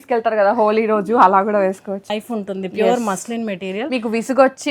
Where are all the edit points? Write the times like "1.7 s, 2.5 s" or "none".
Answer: 2.2 s